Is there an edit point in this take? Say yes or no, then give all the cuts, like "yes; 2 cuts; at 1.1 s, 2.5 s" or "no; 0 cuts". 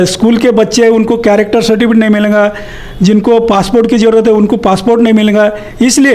no; 0 cuts